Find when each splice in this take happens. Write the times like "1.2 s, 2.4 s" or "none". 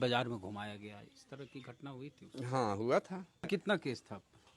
3.5 s